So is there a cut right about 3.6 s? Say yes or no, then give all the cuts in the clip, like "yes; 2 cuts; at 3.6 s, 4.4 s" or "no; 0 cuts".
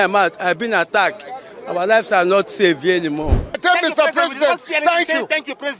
yes; 1 cut; at 3.6 s